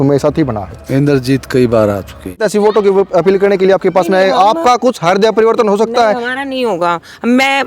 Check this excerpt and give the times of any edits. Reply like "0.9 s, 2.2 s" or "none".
2.3 s